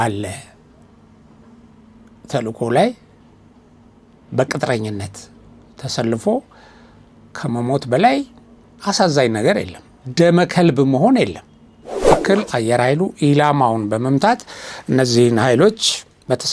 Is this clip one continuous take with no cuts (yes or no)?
no